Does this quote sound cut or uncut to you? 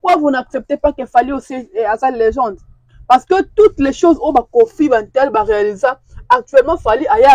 uncut